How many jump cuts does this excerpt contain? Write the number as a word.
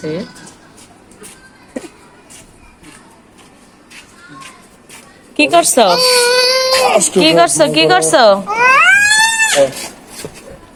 zero